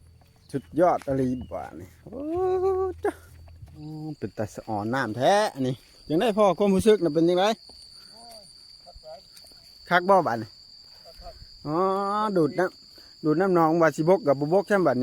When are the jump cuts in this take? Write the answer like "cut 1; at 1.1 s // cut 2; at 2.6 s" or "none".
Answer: cut 1; at 3.7 s